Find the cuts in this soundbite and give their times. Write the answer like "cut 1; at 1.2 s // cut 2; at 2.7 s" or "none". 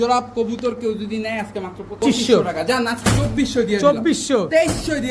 cut 1; at 2.0 s